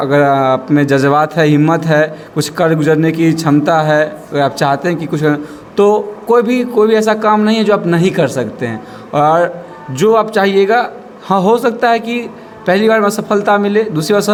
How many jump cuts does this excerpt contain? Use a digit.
0